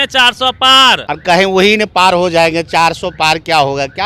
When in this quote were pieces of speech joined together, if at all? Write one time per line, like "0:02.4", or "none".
0:01.1